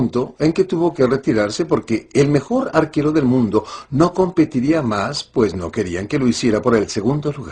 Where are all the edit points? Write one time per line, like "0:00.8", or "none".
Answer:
0:05.2